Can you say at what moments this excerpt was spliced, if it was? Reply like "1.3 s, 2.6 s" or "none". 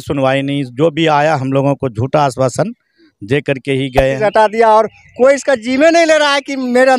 4.2 s